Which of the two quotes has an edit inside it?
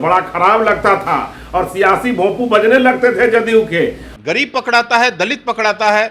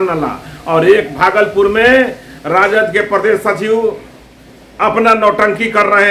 first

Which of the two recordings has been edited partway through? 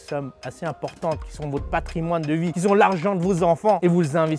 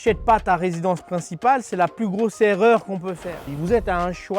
second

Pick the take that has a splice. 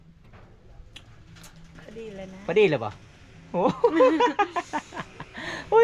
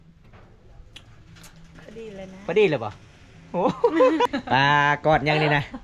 second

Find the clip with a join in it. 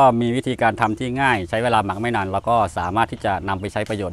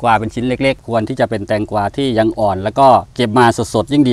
second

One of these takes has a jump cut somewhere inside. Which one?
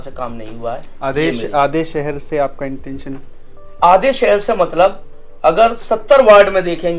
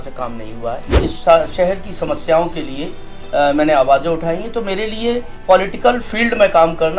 second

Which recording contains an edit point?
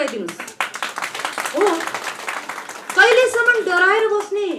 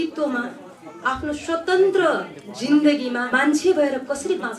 second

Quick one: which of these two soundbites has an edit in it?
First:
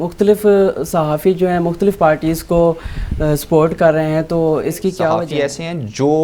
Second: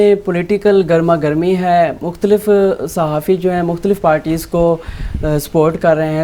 first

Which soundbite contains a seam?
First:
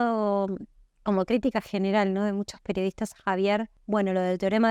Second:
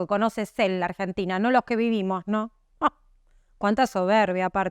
first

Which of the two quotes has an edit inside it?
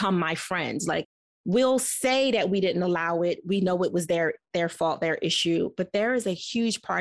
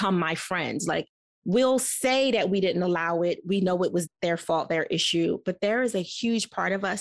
second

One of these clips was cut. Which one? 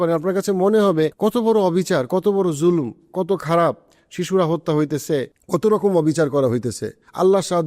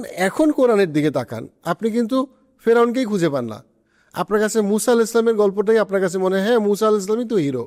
first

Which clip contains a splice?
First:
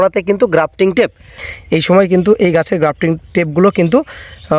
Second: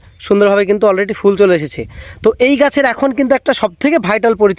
first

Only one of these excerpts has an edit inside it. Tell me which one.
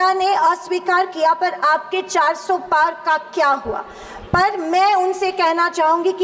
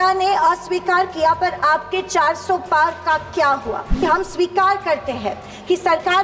second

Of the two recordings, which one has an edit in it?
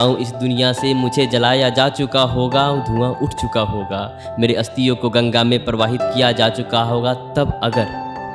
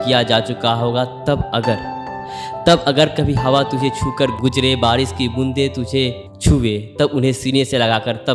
second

